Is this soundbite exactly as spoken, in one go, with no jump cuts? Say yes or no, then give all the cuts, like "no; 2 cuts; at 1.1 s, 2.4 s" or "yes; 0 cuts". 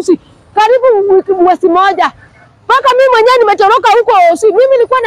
yes; 0 cuts